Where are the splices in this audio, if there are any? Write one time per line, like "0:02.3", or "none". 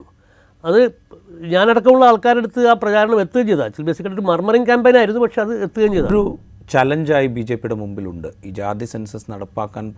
0:06.1